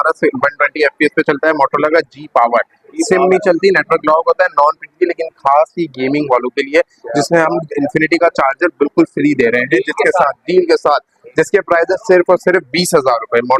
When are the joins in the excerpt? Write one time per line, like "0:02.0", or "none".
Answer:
none